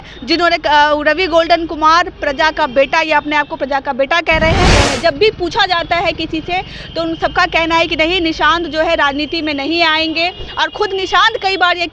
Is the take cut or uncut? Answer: cut